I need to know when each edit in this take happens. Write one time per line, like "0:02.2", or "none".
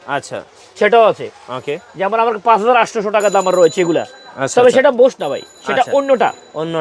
none